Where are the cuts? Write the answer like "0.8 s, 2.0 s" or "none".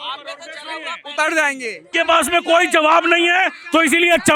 1.9 s